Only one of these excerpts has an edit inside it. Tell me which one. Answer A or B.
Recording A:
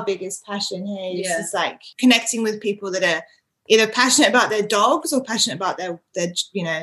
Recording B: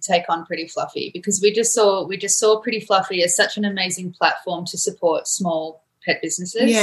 A